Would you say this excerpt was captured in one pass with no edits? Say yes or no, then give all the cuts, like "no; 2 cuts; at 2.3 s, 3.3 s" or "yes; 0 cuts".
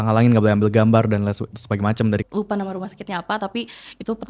no; 1 cut; at 2.2 s